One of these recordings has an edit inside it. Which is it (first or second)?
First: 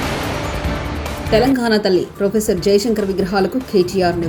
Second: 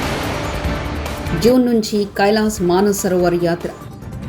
second